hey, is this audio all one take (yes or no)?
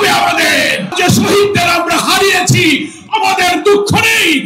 no